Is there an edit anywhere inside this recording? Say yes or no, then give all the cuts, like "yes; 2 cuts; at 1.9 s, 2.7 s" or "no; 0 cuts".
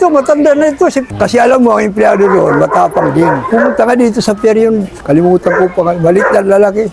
yes; 2 cuts; at 1.0 s, 3.4 s